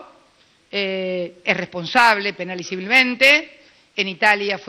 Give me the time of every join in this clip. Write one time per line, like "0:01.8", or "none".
none